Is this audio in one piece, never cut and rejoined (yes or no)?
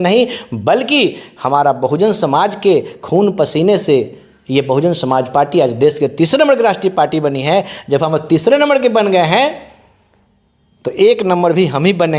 yes